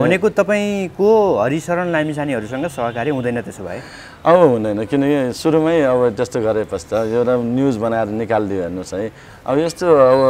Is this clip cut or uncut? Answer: cut